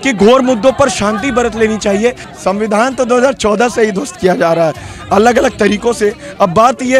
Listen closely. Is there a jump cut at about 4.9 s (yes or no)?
no